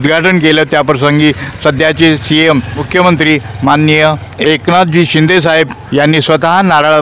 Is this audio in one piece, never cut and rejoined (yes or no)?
no